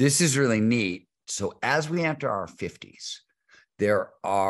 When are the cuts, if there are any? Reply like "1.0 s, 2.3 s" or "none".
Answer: 1.2 s